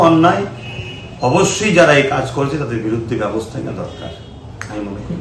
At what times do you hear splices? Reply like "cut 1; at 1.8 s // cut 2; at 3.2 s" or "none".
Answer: none